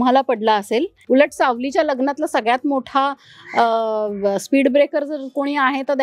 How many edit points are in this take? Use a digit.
1